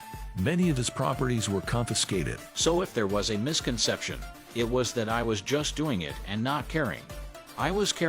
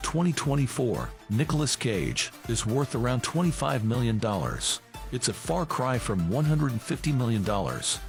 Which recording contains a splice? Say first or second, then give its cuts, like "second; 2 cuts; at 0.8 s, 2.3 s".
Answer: first; 1 cut; at 2.4 s